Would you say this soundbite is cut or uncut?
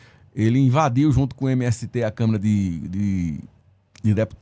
uncut